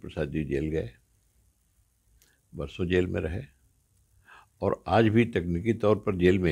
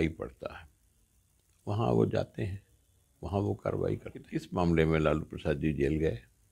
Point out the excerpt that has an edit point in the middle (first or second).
second